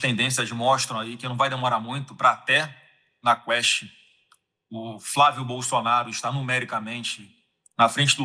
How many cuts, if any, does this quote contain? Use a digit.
0